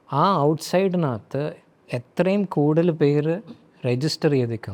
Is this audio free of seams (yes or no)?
yes